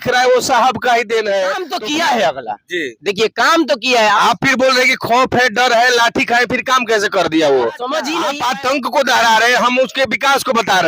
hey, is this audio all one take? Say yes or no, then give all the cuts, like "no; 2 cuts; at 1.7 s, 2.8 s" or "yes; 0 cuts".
no; 2 cuts; at 1.6 s, 8.2 s